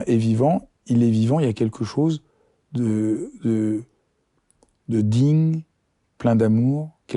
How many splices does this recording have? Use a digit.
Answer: 0